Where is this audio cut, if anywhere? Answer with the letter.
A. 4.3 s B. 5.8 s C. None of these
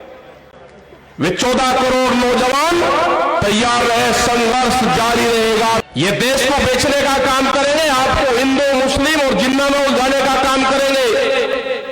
B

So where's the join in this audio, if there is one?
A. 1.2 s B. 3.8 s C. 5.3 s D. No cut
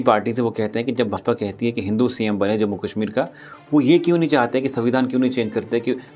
A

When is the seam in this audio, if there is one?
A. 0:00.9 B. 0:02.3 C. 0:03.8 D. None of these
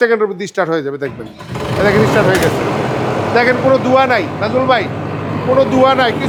D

